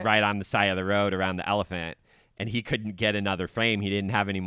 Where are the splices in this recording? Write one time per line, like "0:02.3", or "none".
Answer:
none